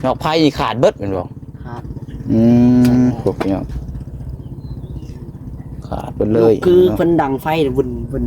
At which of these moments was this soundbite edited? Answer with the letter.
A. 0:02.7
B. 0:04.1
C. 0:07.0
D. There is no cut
D